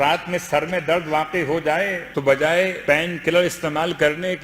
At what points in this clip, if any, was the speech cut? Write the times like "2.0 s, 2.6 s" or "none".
2.0 s, 2.8 s